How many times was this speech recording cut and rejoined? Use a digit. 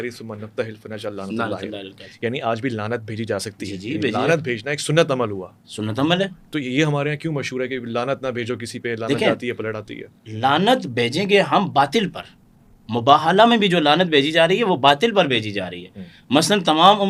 0